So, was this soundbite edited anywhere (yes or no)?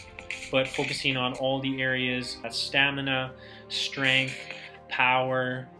yes